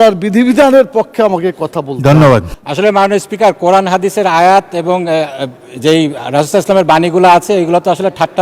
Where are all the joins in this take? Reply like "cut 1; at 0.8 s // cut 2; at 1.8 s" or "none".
cut 1; at 2.5 s